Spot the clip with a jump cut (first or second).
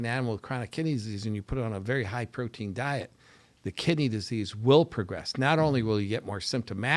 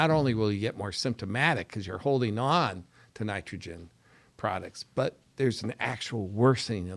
second